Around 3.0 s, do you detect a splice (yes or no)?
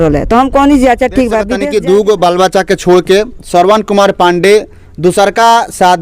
no